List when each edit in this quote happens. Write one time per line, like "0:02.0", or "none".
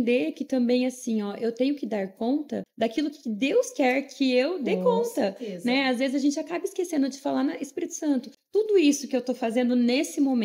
0:02.6
0:08.4